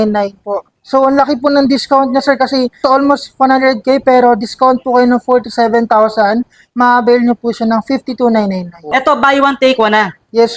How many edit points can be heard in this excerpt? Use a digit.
2